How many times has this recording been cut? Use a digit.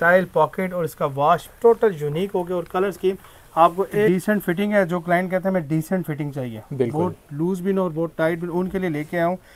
1